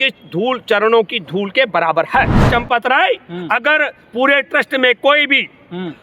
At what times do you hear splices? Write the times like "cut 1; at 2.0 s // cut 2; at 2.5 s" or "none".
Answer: cut 1; at 2.4 s